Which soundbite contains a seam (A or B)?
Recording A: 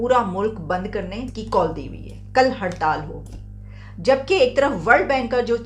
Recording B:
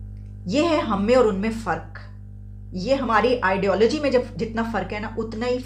A